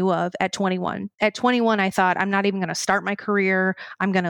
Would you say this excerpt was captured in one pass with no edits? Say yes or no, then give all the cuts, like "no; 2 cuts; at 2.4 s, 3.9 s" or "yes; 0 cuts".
yes; 0 cuts